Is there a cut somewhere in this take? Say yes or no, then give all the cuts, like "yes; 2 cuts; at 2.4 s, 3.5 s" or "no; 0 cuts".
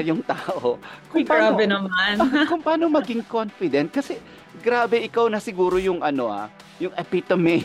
no; 0 cuts